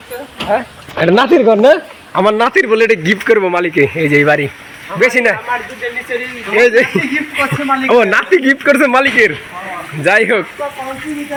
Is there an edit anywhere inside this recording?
no; 0 cuts

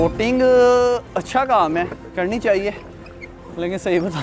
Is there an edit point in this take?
no; 0 cuts

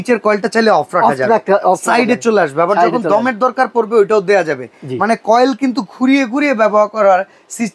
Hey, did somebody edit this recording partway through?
no; 0 cuts

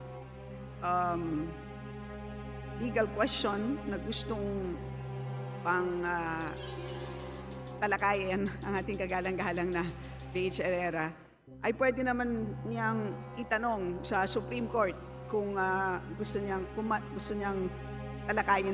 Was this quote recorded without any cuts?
no; 2 cuts; at 1.5 s, 2.8 s

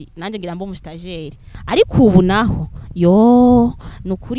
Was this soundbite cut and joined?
yes; 1 cut; at 1.5 s

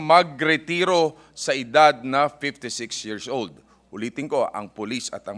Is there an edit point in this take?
no; 0 cuts

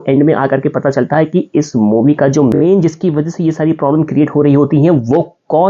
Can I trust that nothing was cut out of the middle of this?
yes; 0 cuts

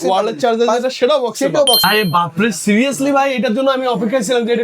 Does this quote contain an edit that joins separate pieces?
yes; 1 cut; at 1.8 s

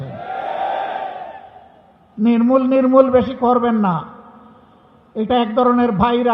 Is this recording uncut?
yes; 0 cuts

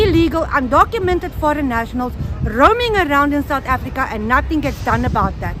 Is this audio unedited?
yes; 0 cuts

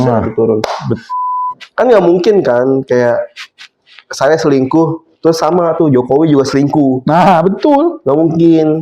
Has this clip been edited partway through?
yes; 1 cut; at 1.1 s

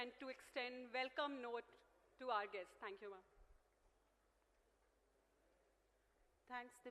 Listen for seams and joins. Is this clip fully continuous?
no; 1 cut; at 5.4 s

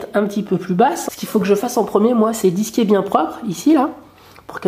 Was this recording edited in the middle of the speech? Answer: yes; 1 cut; at 1.0 s

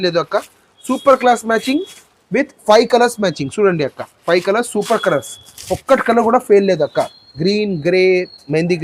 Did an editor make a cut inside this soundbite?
no; 0 cuts

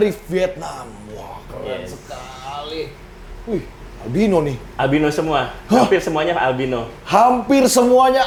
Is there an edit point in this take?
no; 0 cuts

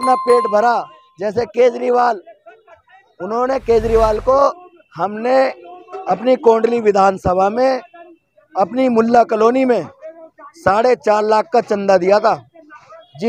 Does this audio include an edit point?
no; 0 cuts

